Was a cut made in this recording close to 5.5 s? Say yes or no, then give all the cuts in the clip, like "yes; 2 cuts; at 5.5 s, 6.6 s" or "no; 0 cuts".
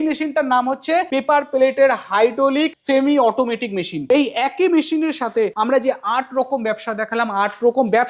yes; 4 cuts; at 1.1 s, 2.8 s, 3.9 s, 5.5 s